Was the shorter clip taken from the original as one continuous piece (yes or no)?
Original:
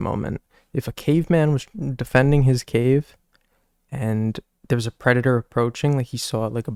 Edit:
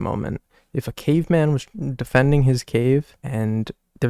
no